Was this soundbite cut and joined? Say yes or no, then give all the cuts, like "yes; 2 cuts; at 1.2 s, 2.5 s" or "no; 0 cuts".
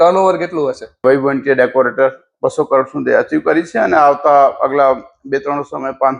yes; 1 cut; at 1.0 s